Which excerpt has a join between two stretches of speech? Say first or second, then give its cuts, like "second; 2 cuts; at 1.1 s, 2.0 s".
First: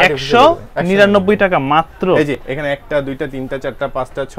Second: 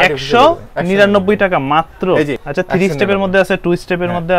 second; 1 cut; at 2.4 s